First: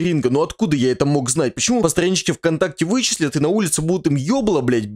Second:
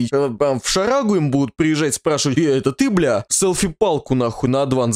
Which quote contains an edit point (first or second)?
first